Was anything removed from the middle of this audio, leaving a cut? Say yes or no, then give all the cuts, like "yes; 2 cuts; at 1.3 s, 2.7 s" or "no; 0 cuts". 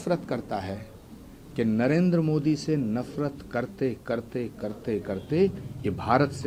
no; 0 cuts